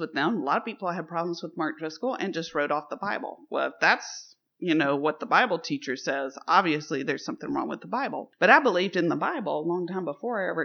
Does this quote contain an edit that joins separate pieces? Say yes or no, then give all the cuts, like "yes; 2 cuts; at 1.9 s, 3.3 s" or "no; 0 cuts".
no; 0 cuts